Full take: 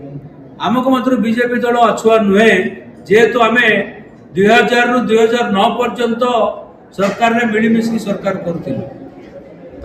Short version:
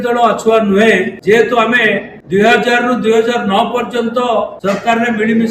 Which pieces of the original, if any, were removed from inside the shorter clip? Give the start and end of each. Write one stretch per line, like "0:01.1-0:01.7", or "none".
0:02.7-0:03.0
0:04.0-0:04.2
0:06.6-0:06.9